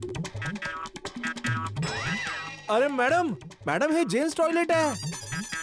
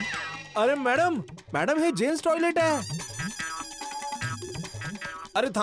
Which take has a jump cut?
first; 1 cut; at 0.9 s

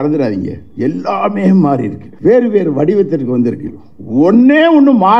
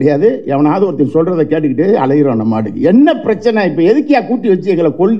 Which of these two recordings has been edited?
first; 1 cut; at 2.0 s

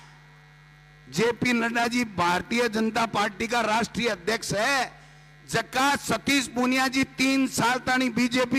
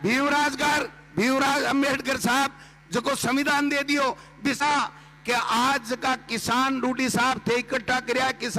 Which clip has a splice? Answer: second; 1 cut; at 4.6 s

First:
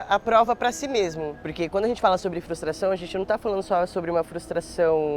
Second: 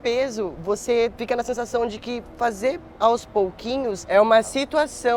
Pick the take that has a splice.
first; 1 cut; at 1.3 s

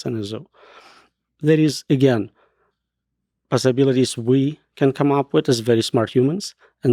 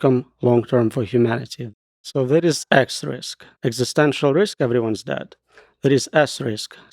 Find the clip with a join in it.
second; 1 cut; at 1.6 s

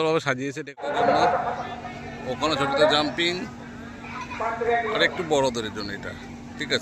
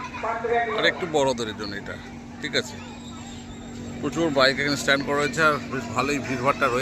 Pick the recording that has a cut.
first; 1 cut; at 0.9 s

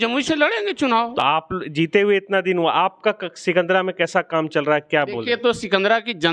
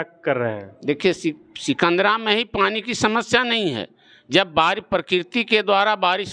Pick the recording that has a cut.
first; 1 cut; at 1.2 s

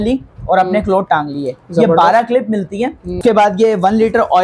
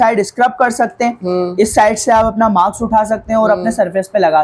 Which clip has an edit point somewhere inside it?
first; 1 cut; at 3.2 s

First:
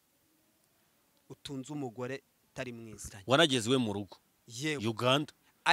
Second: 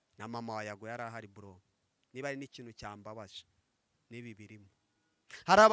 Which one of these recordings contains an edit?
first; 1 cut; at 3.0 s

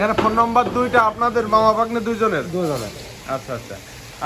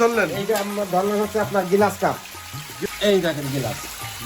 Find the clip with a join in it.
second; 1 cut; at 2.7 s

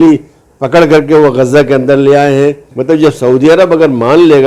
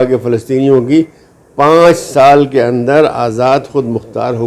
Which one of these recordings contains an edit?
first; 1 cut; at 2.7 s

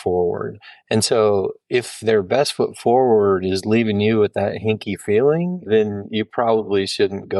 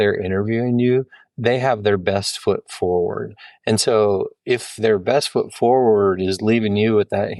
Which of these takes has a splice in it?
first; 1 cut; at 5.6 s

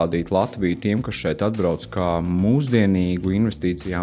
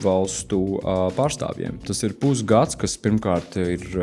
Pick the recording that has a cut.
second; 1 cut; at 1.9 s

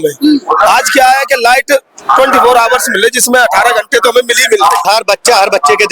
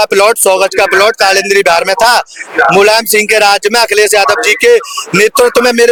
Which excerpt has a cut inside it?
first; 1 cut; at 4.9 s

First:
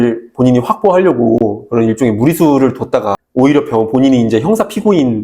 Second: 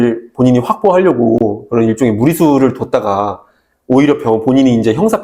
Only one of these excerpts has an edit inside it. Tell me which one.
first; 1 cut; at 3.1 s

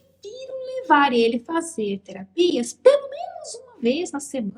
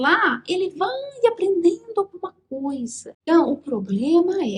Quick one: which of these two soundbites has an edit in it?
second; 1 cut; at 3.1 s

